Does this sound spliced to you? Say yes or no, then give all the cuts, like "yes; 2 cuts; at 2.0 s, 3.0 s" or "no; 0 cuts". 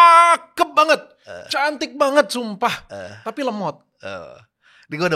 no; 0 cuts